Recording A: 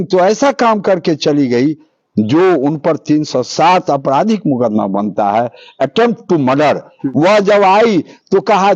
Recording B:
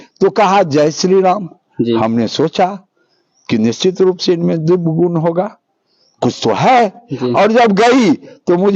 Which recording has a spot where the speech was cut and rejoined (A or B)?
A